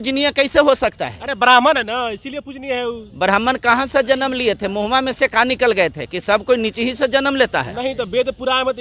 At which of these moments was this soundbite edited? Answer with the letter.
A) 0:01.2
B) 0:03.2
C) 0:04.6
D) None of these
D